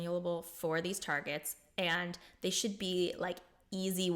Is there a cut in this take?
yes; 1 cut; at 1.6 s

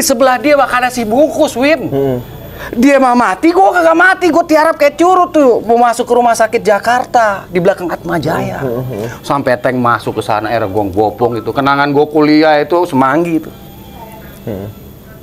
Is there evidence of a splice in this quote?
no; 0 cuts

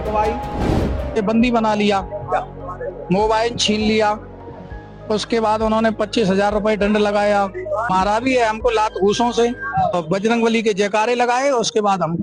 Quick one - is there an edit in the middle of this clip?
no; 0 cuts

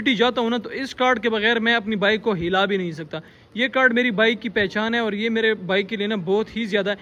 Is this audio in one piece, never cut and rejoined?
yes; 0 cuts

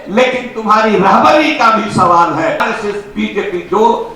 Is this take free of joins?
no; 1 cut; at 2.6 s

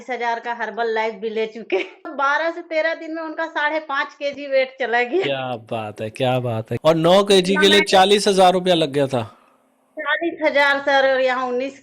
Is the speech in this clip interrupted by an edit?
yes; 2 cuts; at 2.1 s, 6.8 s

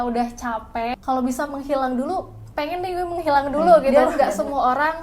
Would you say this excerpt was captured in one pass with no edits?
no; 2 cuts; at 0.9 s, 3.9 s

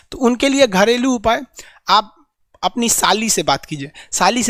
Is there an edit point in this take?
no; 0 cuts

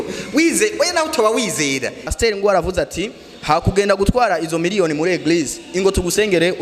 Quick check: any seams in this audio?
yes; 1 cut; at 2.1 s

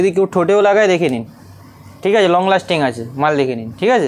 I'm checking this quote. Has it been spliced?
no; 0 cuts

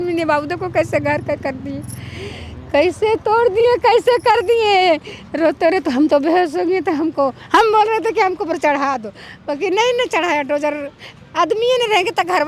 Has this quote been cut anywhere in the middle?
no; 0 cuts

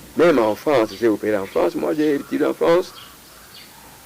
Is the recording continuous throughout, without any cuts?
yes; 0 cuts

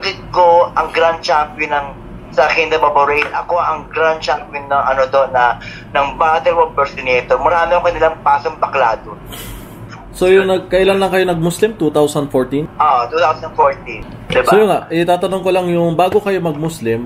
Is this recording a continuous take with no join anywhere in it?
yes; 0 cuts

